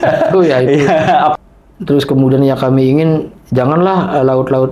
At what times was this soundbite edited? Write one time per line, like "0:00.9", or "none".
0:01.3